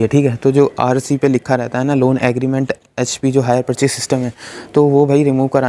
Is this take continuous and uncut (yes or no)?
yes